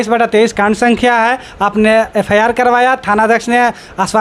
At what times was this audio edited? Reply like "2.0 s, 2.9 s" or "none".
none